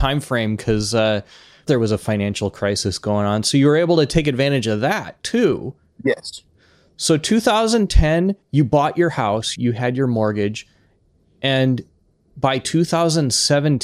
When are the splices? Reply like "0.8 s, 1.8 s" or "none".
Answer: 1.6 s, 8.4 s, 9.5 s